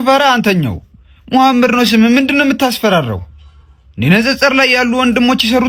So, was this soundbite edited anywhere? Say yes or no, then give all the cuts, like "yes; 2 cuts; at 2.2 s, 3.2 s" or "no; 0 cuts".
no; 0 cuts